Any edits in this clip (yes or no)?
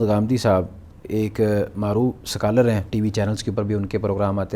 yes